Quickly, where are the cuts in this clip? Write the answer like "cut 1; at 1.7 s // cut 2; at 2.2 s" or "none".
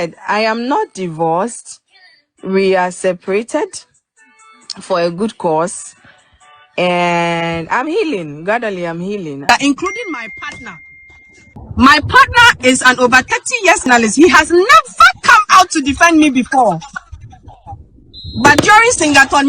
cut 1; at 9.5 s // cut 2; at 11.5 s // cut 3; at 13.9 s